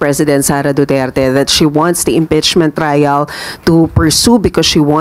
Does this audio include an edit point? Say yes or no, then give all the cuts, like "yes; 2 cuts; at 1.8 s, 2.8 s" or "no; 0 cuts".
no; 0 cuts